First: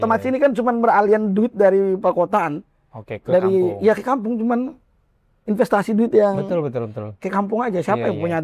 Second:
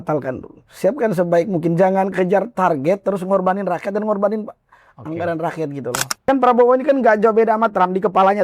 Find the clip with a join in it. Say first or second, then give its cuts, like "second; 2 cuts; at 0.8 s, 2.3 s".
second; 1 cut; at 6.1 s